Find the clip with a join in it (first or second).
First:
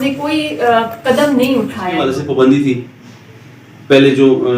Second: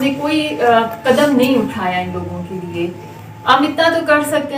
first